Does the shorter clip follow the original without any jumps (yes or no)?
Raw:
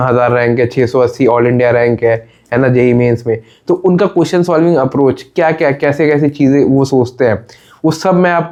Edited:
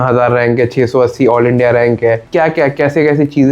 no